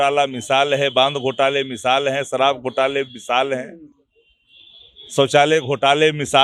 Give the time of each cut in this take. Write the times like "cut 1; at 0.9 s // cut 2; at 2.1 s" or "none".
none